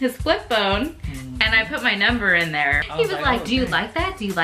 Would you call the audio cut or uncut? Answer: cut